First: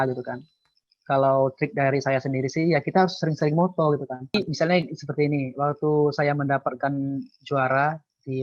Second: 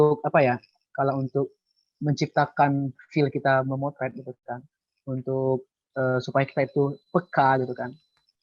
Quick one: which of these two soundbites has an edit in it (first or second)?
first